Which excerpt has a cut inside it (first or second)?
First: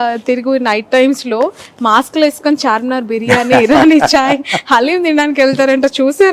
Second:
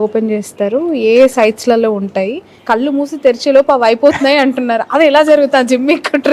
second